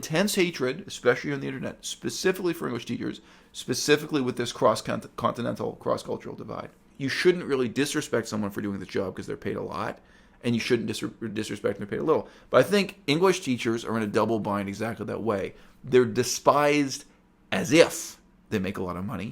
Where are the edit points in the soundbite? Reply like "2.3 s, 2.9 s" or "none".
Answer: 6.9 s